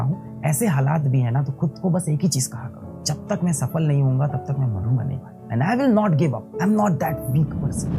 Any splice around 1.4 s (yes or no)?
no